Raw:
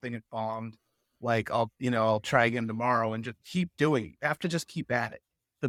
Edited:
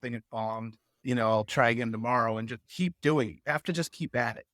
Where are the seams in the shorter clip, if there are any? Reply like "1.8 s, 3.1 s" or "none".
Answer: 1.0 s